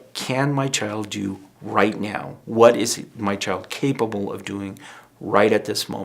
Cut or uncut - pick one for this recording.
uncut